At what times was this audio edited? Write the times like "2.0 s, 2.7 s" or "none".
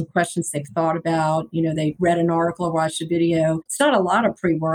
1.9 s, 3.7 s